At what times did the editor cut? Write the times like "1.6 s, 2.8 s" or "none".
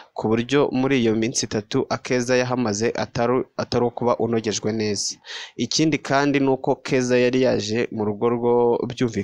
none

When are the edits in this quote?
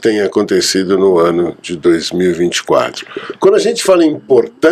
none

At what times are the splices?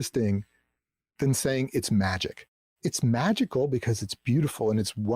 1.1 s, 2.4 s

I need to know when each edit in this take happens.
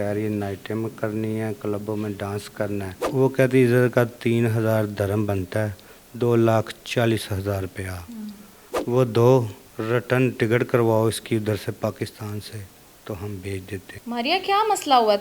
3.0 s, 13.9 s

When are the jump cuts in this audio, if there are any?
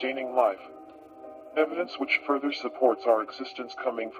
2.4 s

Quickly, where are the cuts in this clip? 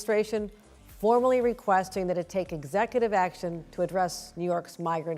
none

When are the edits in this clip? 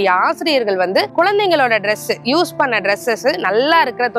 1.1 s

